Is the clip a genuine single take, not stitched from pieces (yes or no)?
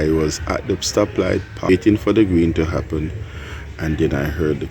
no